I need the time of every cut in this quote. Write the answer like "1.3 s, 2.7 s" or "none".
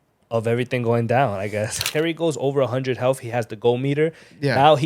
1.9 s